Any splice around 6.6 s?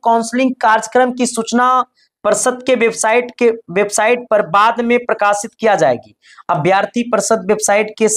no; 0 cuts

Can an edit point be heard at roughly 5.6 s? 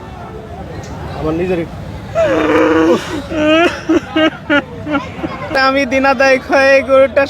yes; 1 cut; at 5.6 s

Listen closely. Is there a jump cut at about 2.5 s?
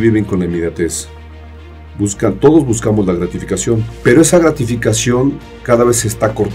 no; 1 cut; at 3.9 s

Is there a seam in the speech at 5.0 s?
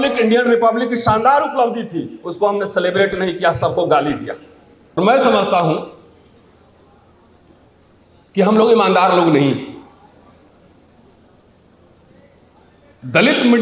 yes; 1 cut; at 5.0 s

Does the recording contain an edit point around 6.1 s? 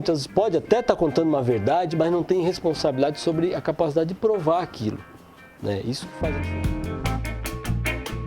yes; 1 cut; at 6.1 s

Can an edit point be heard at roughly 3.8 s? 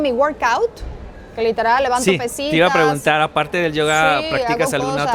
no; 0 cuts

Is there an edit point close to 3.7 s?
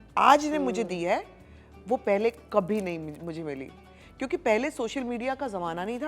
no; 0 cuts

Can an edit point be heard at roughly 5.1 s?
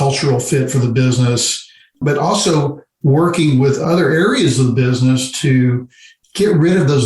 no; 1 cut; at 3.8 s

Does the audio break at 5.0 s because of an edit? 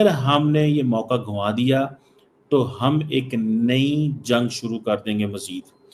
no; 0 cuts

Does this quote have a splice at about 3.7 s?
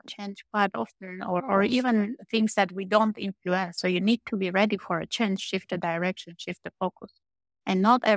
yes; 1 cut; at 3.7 s

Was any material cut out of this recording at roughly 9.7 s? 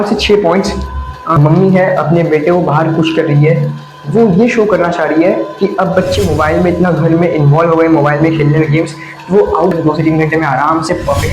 yes; 2 cuts; at 1.4 s, 9.7 s

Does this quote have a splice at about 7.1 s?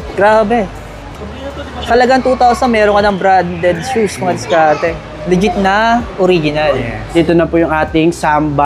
yes; 1 cut; at 7.1 s

